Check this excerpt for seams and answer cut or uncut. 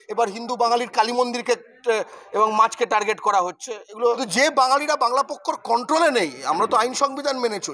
cut